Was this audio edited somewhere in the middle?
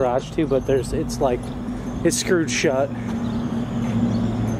no; 0 cuts

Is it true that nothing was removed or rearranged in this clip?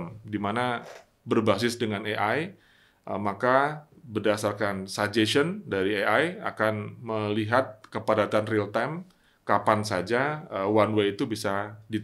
yes; 0 cuts

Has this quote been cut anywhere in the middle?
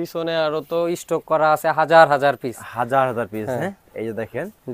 no; 0 cuts

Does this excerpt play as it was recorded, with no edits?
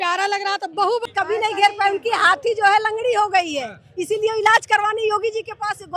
no; 1 cut; at 1.1 s

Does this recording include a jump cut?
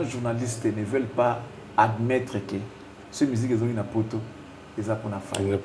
no; 0 cuts

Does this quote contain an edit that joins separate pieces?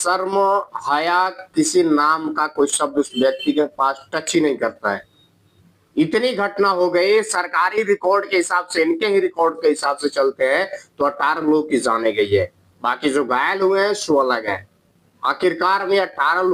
no; 0 cuts

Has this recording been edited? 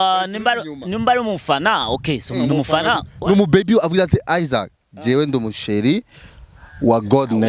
no; 0 cuts

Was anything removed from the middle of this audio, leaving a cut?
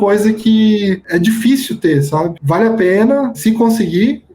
yes; 2 cuts; at 2.3 s, 3.4 s

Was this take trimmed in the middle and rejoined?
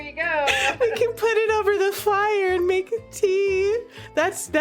no; 0 cuts

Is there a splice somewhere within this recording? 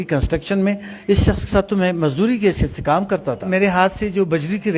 yes; 1 cut; at 3.4 s

